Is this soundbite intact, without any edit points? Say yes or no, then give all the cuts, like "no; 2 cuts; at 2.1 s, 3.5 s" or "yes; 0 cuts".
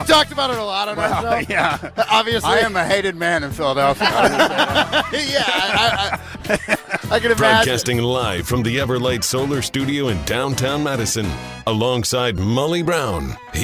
no; 1 cut; at 7.6 s